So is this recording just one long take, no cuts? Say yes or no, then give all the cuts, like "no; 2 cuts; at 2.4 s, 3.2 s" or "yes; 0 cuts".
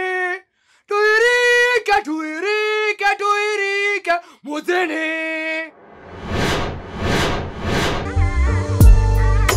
no; 1 cut; at 8.1 s